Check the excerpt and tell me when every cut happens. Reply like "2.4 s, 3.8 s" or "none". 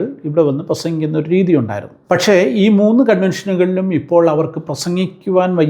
1.9 s

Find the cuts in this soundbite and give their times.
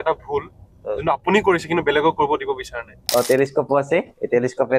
3.0 s

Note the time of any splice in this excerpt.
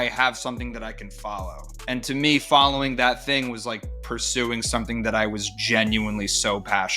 1.7 s

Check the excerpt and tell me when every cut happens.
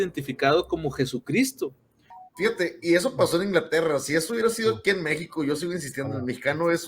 2.2 s

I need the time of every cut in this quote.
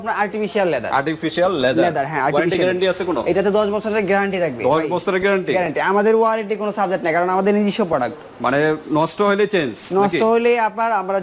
none

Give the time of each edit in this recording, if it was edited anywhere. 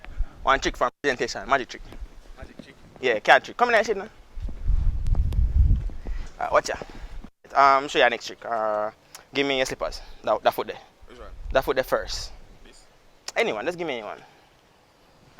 7.5 s

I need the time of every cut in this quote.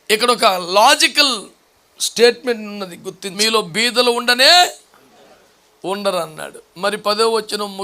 3.3 s

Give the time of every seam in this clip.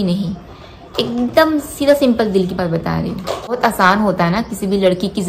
3.6 s

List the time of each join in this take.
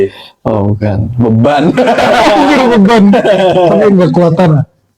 none

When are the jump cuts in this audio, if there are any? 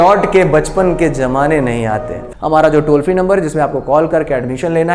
2.2 s

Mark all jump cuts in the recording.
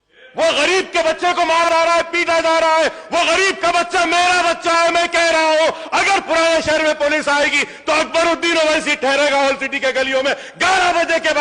1.6 s

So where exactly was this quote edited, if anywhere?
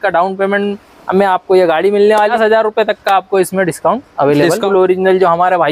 2.3 s, 4.6 s

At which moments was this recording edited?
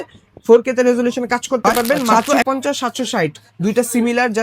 2.1 s

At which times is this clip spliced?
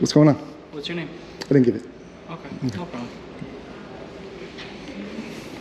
none

